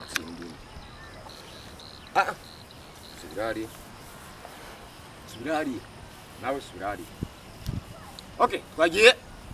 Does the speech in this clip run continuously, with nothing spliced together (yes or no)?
no